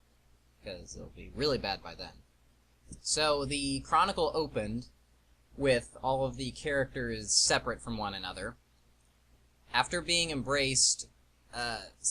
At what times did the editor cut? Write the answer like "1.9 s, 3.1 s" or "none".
7.9 s